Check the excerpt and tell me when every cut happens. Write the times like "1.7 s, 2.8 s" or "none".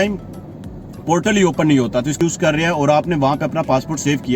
2.2 s